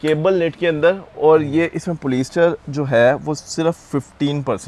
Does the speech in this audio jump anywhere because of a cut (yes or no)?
no